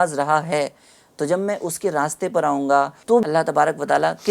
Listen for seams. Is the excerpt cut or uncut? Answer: cut